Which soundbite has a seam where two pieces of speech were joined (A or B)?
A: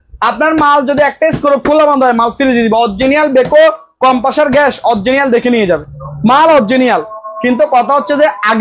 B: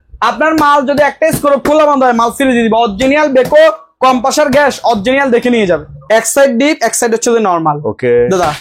B